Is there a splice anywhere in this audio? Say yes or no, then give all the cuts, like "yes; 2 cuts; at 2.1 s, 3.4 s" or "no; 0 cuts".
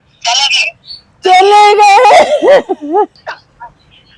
yes; 1 cut; at 3.2 s